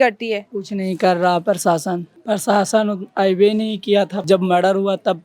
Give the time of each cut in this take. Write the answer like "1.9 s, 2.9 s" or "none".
2.1 s, 4.2 s